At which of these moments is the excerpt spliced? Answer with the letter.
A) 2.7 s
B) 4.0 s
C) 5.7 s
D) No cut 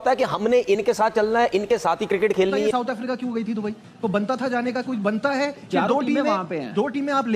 A